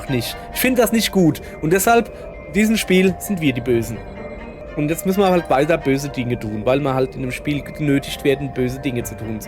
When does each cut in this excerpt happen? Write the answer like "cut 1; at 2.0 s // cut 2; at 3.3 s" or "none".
cut 1; at 2.5 s